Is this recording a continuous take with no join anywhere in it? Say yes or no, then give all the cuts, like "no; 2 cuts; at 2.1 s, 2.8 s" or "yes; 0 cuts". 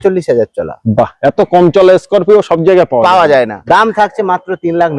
no; 1 cut; at 3.6 s